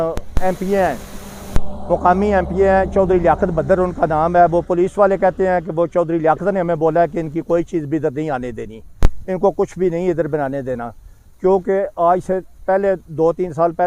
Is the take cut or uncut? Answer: uncut